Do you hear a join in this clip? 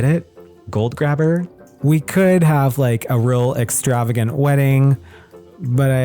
yes; 1 cut; at 1.5 s

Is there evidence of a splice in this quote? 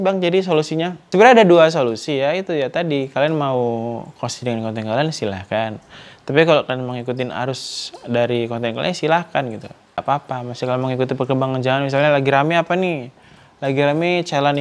yes; 2 cuts; at 1.0 s, 10.0 s

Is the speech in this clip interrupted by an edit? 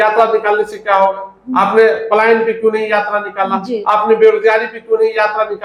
no; 0 cuts

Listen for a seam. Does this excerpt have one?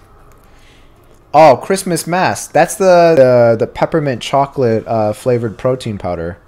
yes; 1 cut; at 3.2 s

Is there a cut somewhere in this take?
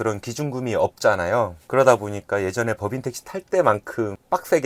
no; 0 cuts

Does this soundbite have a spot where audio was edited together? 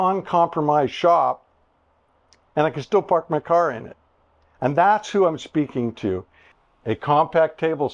yes; 1 cut; at 6.7 s

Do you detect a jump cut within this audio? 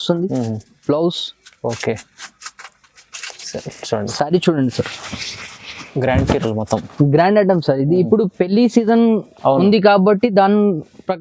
no; 0 cuts

